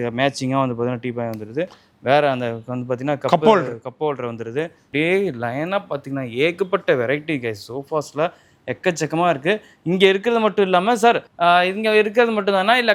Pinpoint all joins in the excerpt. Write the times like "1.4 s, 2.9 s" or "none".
none